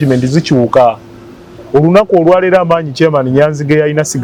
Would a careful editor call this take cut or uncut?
uncut